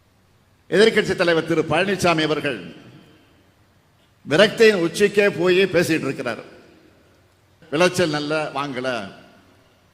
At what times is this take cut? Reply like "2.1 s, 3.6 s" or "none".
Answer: 7.5 s

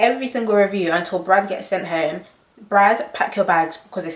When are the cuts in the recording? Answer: none

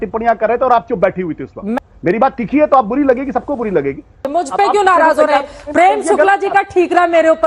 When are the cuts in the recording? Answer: 1.8 s, 4.3 s

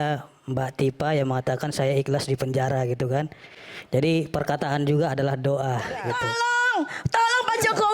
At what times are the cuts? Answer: 6.2 s

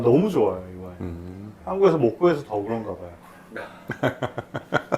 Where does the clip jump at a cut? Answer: none

